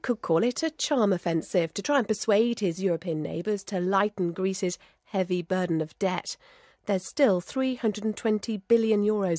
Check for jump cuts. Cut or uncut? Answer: cut